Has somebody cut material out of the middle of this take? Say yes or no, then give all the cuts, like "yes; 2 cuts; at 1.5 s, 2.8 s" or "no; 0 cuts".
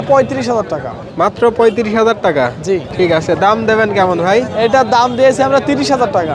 yes; 1 cut; at 2.9 s